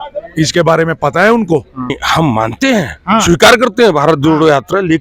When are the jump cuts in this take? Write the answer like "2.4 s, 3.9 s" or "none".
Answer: 2.0 s